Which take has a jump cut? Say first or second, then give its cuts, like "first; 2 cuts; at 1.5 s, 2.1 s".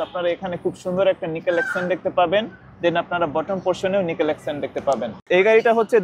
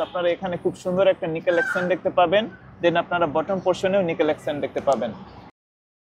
first; 1 cut; at 5.1 s